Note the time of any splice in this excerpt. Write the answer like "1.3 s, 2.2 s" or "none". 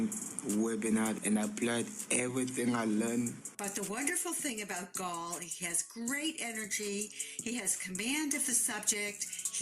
2.5 s, 3.5 s